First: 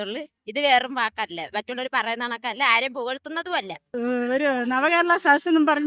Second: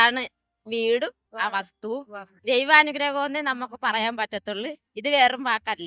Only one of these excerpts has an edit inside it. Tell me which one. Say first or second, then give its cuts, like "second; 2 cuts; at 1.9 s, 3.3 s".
first; 1 cut; at 3.9 s